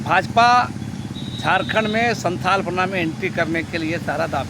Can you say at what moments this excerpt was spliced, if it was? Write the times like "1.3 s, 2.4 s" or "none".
none

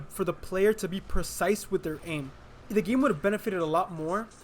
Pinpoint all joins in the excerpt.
2.6 s

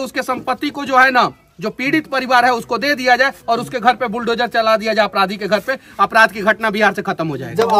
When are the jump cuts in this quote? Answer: none

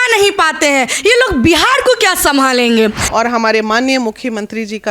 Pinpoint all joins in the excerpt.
3.0 s

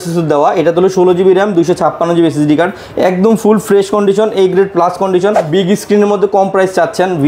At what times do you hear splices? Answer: 5.5 s

